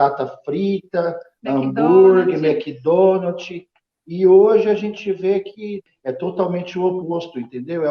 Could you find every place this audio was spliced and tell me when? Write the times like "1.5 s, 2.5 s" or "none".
5.8 s